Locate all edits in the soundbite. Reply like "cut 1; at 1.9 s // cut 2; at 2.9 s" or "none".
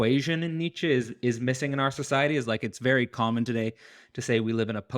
none